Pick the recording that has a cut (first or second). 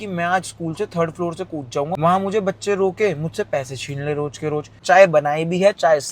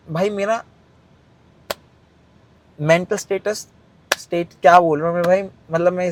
first